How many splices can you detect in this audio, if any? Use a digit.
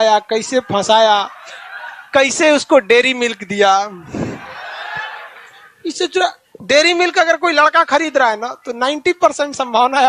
0